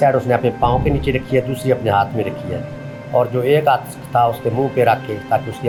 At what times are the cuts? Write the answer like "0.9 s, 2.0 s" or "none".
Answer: none